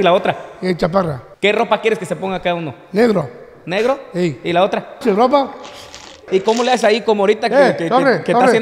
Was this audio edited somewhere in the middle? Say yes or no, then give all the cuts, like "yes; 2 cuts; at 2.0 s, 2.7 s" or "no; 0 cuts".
yes; 2 cuts; at 1.2 s, 6.2 s